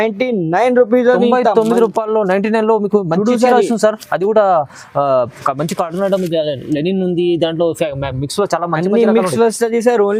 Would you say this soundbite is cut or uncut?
uncut